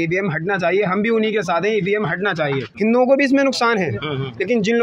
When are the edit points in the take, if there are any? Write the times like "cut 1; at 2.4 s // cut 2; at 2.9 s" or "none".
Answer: cut 1; at 2.7 s